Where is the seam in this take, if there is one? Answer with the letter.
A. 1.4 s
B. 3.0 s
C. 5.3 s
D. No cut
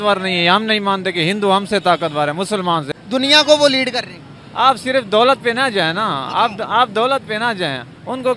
B